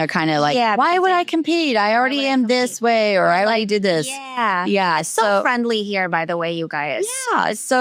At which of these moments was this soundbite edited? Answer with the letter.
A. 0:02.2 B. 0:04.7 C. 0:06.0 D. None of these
D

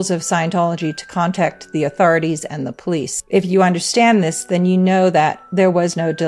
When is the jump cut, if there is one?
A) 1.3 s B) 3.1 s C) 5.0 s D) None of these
B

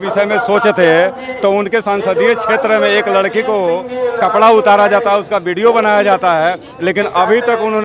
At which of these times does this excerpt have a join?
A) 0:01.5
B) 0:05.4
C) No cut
C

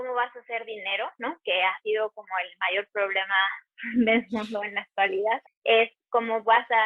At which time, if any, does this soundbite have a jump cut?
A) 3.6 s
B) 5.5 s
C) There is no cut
B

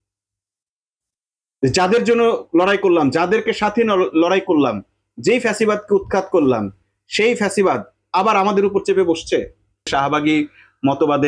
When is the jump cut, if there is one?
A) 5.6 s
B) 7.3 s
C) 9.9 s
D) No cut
C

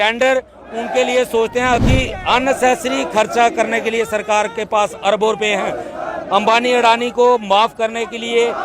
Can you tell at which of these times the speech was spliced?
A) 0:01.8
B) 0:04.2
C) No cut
A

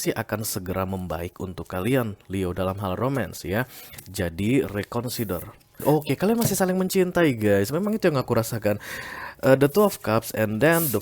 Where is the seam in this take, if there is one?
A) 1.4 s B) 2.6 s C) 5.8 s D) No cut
C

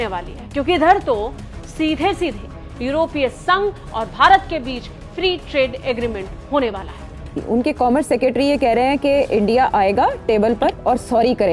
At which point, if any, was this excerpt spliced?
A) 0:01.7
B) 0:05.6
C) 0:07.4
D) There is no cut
C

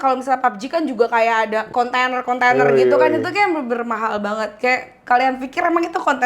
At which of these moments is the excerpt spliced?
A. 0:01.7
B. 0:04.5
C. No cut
A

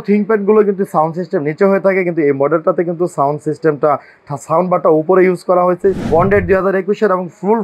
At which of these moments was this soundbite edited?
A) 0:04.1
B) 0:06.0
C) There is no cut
B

